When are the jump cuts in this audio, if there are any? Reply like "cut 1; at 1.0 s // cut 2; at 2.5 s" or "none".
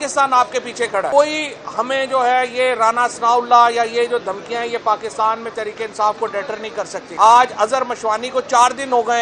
cut 1; at 1.1 s // cut 2; at 7.0 s